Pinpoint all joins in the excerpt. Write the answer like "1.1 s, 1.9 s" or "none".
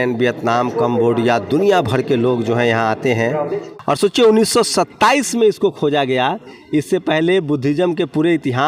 3.6 s